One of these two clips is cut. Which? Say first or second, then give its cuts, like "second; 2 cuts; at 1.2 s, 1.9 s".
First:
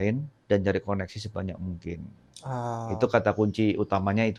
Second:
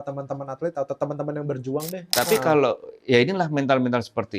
second; 1 cut; at 2.1 s